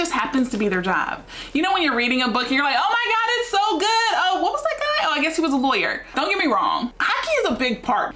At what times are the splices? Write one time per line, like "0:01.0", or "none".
none